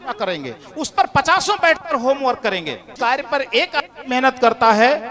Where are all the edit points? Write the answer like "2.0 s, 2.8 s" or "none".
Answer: 2.9 s